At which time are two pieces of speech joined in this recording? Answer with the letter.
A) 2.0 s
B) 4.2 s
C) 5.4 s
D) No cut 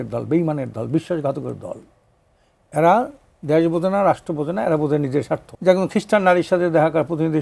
C